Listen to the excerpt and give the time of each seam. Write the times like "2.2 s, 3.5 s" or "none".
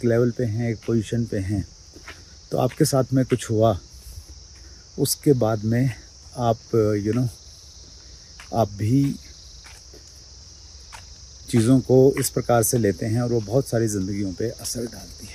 none

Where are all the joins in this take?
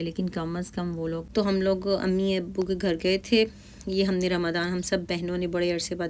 1.2 s

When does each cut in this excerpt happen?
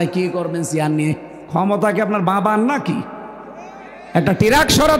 1.3 s

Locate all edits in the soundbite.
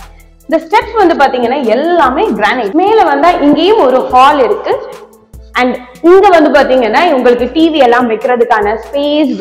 2.7 s

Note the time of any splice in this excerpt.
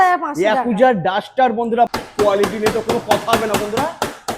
2.0 s

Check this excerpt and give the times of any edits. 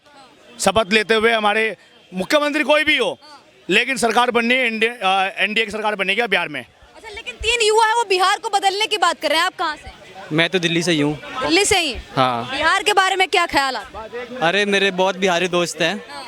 none

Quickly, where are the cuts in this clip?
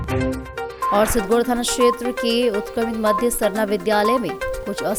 none

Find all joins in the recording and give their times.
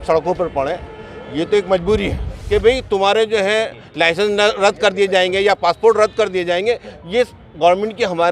2.3 s

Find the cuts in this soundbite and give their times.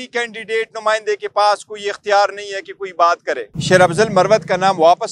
3.5 s

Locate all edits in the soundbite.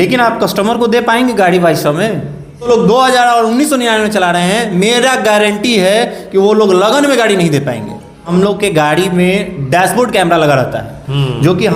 2.7 s, 8.3 s

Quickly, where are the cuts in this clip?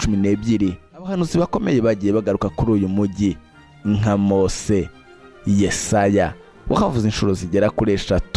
1.1 s

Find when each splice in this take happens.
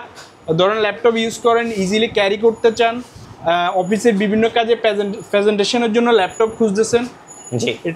none

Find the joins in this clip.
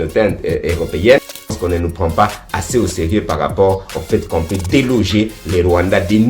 1.5 s

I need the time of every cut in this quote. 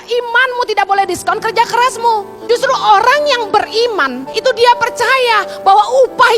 2.3 s, 4.2 s

